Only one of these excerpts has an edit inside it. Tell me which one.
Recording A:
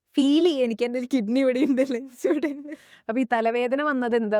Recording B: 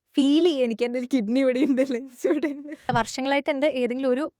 B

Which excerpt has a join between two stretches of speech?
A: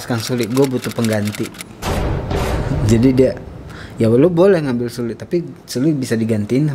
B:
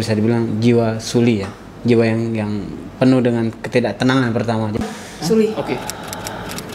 B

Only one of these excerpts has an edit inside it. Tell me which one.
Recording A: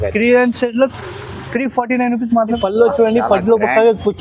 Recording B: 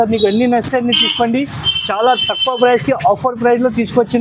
A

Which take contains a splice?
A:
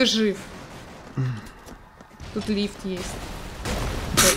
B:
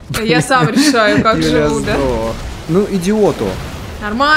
B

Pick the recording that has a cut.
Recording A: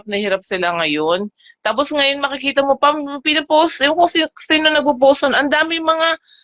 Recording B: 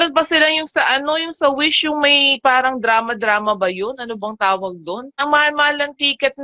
B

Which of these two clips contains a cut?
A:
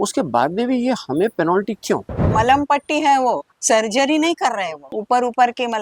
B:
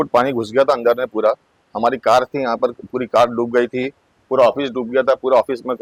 A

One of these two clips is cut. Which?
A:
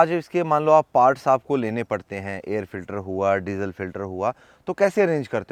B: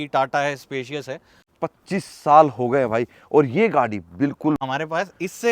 B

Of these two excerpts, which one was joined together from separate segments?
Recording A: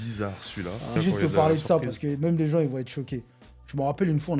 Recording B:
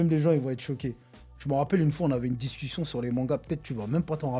A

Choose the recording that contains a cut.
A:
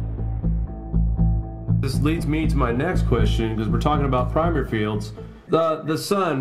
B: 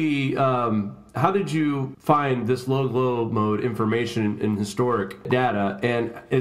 A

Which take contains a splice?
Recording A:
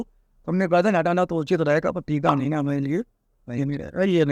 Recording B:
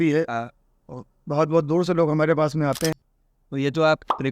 B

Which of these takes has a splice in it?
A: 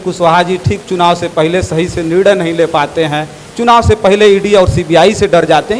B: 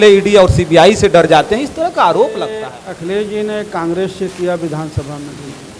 B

